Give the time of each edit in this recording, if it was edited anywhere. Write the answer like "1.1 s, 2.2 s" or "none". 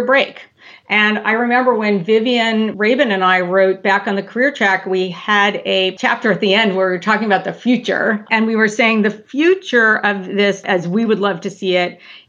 2.7 s, 8.2 s